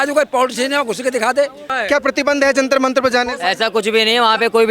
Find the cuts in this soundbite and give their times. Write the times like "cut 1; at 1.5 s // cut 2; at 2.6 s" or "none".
cut 1; at 1.7 s